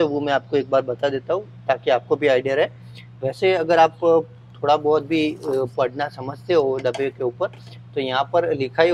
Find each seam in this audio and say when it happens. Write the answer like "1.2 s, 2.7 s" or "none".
none